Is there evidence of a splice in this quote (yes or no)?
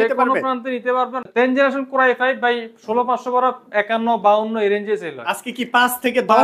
yes